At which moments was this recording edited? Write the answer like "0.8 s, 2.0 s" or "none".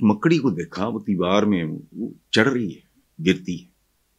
none